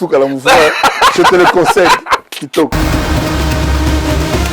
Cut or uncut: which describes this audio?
cut